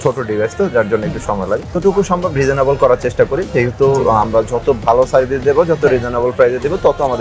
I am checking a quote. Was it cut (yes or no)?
yes